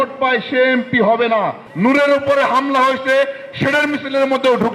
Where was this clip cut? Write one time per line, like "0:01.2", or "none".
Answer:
0:01.6